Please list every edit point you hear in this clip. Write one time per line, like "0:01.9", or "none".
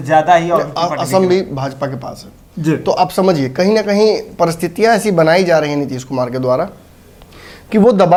none

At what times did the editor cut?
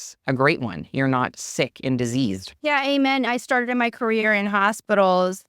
0:02.5

